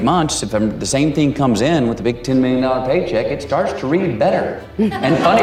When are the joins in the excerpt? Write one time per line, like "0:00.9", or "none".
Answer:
none